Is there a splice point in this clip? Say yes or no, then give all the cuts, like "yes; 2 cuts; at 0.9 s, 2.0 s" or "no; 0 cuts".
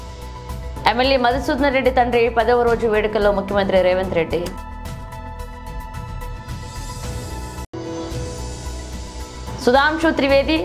no; 0 cuts